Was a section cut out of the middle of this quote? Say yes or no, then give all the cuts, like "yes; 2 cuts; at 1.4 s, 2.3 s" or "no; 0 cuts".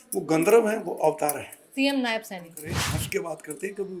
yes; 2 cuts; at 1.5 s, 2.8 s